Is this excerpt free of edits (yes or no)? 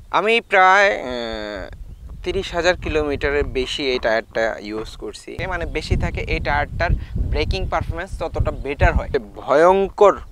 no